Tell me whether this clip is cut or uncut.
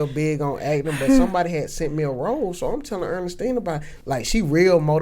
cut